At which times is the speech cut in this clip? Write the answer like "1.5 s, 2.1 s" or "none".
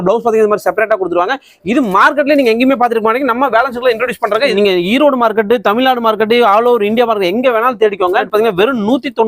4.5 s, 8.3 s

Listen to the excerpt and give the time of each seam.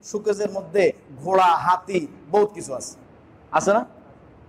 none

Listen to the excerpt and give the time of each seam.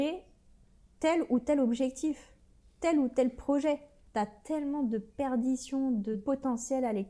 3.9 s, 6.2 s

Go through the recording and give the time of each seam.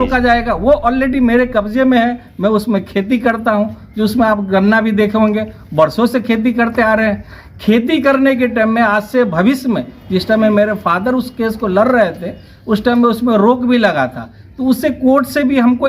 none

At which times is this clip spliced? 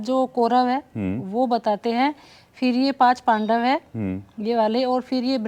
none

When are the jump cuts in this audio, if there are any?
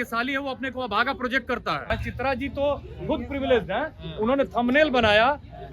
1.9 s

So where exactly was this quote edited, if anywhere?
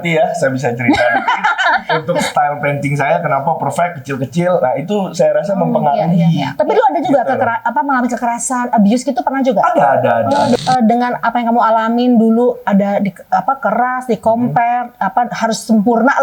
10.6 s

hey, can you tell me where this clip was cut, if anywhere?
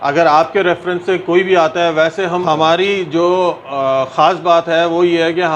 2.4 s

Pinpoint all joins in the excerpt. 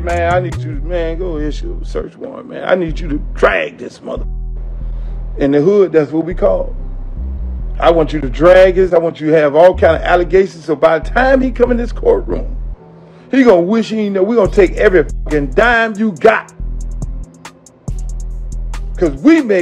8.9 s, 16.4 s, 18.6 s

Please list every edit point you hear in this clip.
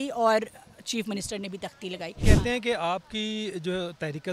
2.1 s

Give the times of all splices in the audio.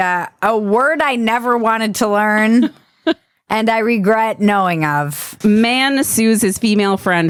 none

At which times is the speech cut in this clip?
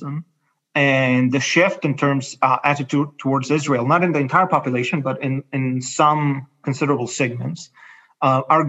none

